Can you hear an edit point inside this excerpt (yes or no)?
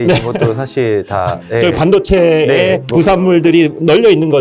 no